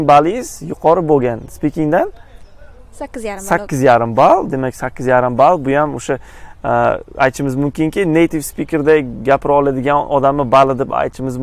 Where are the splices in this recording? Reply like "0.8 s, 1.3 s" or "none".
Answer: none